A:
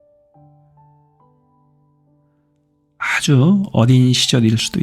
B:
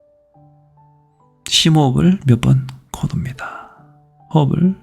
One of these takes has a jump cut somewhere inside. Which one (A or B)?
B